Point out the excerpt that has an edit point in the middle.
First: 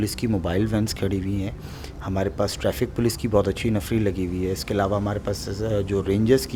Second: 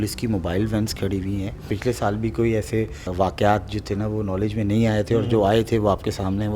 second; 2 cuts; at 1.7 s, 3.1 s

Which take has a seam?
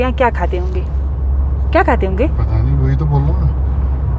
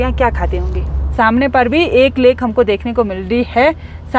second; 1 cut; at 1.0 s

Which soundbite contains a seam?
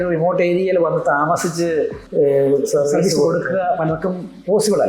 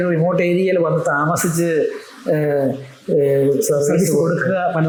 first; 1 cut; at 2.0 s

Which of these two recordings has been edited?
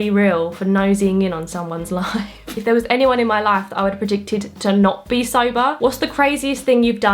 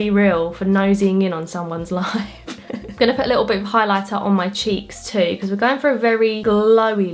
first; 2 cuts; at 2.5 s, 5.8 s

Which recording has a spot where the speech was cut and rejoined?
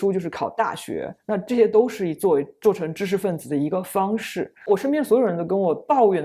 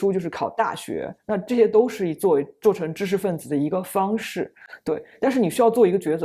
first; 1 cut; at 4.6 s

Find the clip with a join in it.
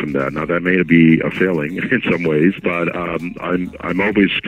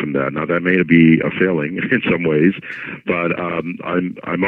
first; 1 cut; at 2.6 s

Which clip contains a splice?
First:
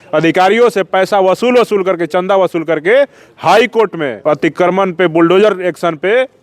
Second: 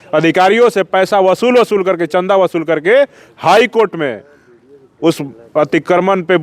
first; 1 cut; at 4.2 s

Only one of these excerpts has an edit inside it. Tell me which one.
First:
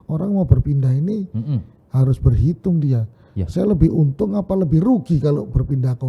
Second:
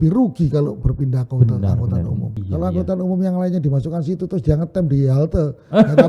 second; 1 cut; at 2.4 s

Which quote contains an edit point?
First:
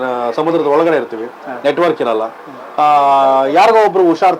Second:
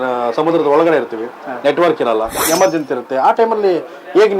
second; 1 cut; at 2.4 s

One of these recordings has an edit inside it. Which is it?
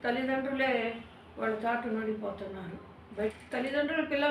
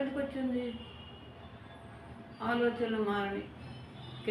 first; 1 cut; at 3.3 s

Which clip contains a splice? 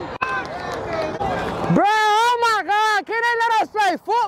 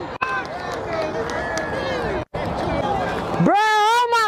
first; 1 cut; at 1.2 s

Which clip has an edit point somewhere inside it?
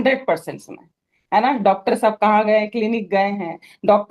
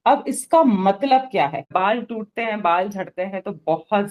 second; 1 cut; at 1.7 s

